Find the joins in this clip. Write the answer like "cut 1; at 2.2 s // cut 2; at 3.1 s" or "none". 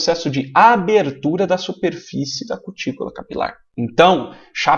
cut 1; at 3.6 s